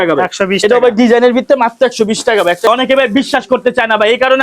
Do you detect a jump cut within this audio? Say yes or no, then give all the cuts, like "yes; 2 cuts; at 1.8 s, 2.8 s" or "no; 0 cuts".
yes; 1 cut; at 2.7 s